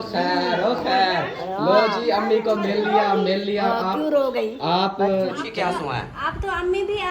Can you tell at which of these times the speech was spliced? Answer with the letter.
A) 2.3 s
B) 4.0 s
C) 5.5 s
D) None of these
C